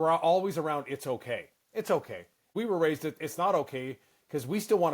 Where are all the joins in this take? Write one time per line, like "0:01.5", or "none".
0:02.5